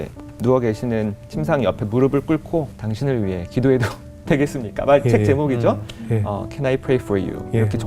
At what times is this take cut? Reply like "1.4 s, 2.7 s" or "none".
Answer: 2.7 s